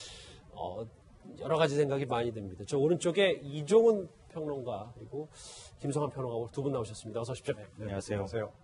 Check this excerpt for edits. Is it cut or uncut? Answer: uncut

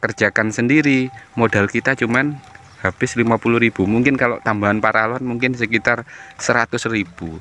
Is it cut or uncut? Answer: uncut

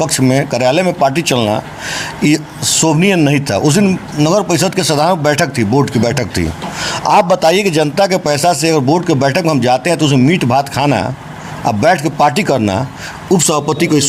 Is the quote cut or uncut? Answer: uncut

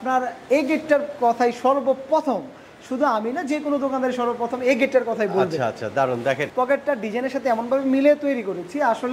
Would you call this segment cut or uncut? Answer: cut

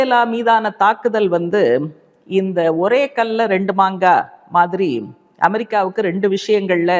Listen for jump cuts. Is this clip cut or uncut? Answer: uncut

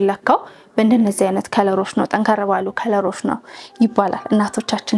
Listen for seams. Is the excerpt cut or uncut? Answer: uncut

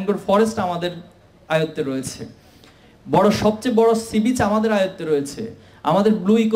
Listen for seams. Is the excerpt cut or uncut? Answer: uncut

